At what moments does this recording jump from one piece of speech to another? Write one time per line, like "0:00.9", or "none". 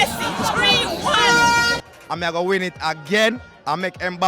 0:01.9